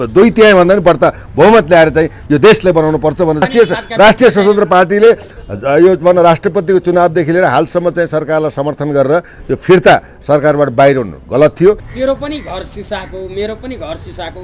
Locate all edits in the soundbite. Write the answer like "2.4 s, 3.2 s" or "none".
3.4 s, 11.9 s